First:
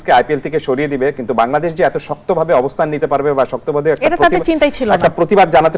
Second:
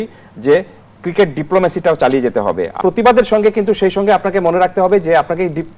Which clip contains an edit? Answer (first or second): second